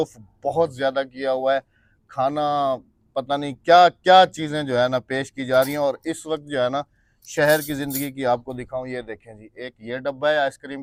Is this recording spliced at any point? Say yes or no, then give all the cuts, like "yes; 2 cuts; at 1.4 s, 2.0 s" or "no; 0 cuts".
no; 0 cuts